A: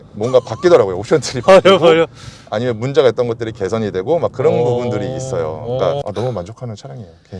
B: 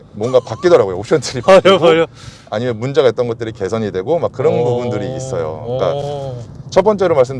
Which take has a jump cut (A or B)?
A